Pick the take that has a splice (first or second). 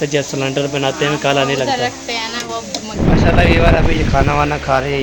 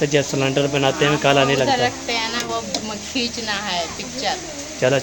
first